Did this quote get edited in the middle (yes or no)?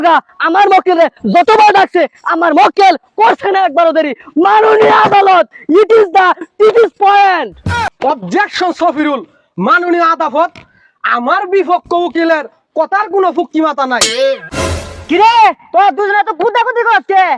yes